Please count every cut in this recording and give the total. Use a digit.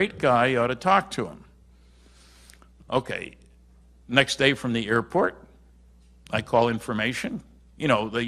1